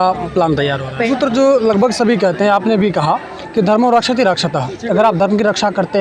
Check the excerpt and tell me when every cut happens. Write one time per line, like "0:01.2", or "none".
0:01.0